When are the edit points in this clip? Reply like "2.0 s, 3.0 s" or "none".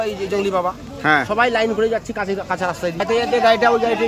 3.0 s